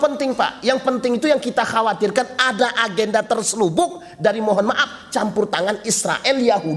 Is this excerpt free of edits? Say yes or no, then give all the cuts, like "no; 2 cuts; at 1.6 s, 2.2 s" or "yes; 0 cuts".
yes; 0 cuts